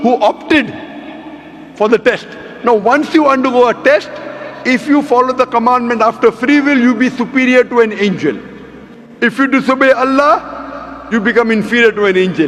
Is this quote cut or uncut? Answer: uncut